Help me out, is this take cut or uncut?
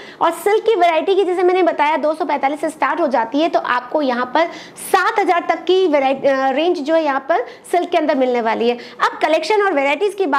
uncut